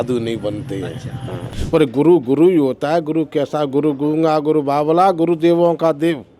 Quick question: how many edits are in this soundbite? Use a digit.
1